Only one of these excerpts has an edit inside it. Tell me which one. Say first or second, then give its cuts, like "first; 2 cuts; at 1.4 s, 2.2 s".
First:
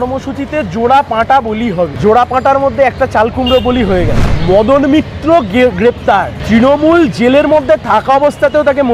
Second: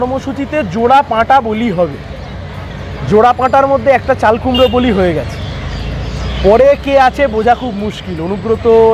first; 3 cuts; at 1.9 s, 4.3 s, 6.4 s